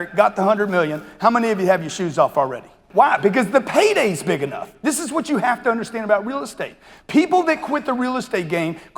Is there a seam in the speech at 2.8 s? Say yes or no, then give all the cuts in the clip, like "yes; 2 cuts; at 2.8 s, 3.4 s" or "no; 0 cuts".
yes; 1 cut; at 2.8 s